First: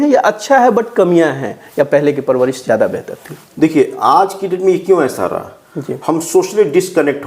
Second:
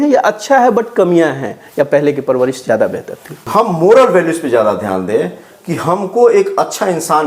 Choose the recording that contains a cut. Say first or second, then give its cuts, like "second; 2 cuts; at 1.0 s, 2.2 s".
second; 1 cut; at 3.3 s